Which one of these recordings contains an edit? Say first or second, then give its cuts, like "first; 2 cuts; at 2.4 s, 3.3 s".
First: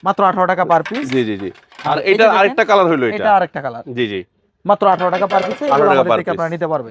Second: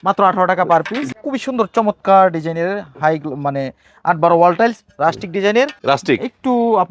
second; 2 cuts; at 1.0 s, 5.8 s